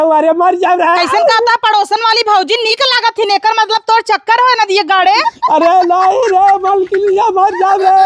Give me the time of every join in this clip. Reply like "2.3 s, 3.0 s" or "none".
none